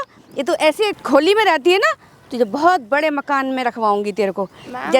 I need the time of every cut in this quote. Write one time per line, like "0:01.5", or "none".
0:01.0